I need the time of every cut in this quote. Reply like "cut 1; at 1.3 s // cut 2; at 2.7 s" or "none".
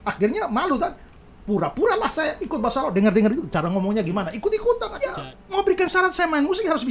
cut 1; at 4.9 s